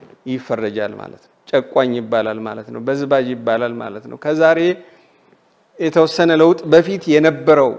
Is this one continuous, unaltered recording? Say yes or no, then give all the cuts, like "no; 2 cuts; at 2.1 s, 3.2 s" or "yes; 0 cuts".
yes; 0 cuts